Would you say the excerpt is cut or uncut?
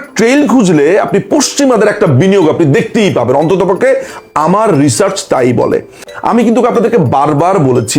cut